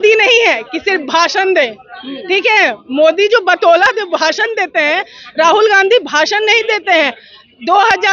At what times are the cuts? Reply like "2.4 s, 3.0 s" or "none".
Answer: none